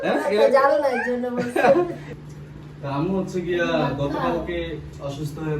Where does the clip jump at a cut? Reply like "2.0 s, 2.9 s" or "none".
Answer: 2.1 s